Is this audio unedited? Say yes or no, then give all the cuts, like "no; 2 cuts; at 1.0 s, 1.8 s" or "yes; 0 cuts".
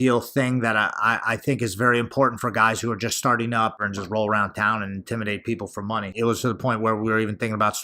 no; 2 cuts; at 3.8 s, 6.1 s